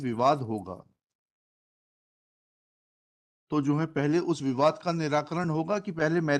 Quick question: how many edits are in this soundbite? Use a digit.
0